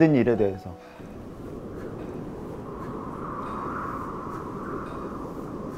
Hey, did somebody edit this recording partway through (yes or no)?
no